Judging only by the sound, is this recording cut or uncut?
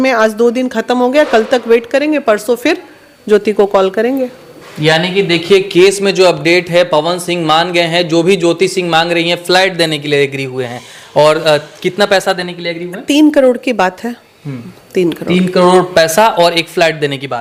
uncut